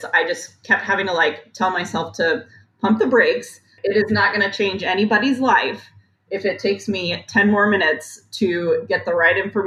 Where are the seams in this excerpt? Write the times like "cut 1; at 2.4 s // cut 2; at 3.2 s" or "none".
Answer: none